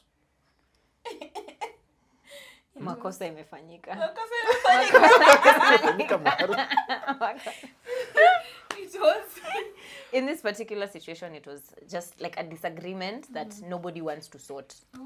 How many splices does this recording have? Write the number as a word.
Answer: zero